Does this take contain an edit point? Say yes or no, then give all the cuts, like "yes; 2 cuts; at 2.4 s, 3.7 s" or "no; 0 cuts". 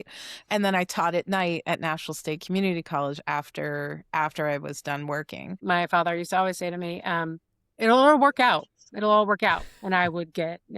yes; 1 cut; at 5.6 s